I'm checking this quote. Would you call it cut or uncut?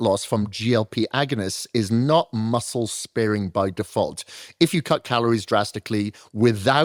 uncut